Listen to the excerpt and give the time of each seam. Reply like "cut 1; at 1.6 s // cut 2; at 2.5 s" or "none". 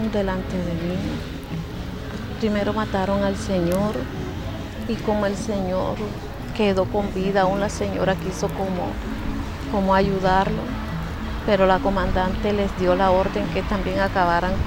none